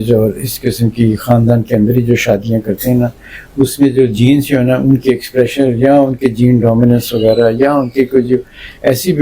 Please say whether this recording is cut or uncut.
uncut